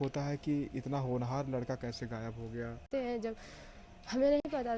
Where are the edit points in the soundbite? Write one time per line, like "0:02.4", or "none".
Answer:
0:02.9